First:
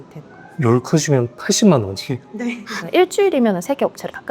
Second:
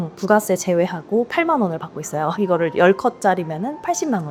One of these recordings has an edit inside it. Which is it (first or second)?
first